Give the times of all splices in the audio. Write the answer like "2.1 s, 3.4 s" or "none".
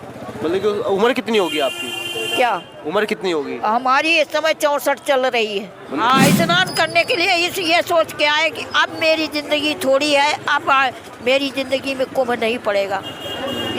6.0 s